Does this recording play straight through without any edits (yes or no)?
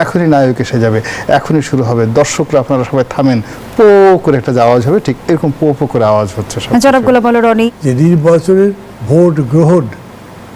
no